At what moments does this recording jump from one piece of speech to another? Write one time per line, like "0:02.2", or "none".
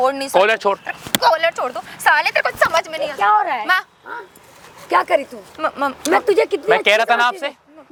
none